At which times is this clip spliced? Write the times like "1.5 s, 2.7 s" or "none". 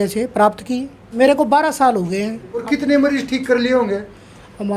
1.0 s, 2.6 s